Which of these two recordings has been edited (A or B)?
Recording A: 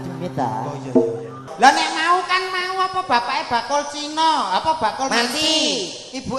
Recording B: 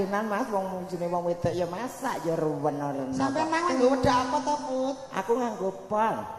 A